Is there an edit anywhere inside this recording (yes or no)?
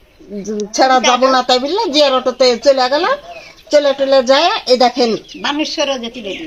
no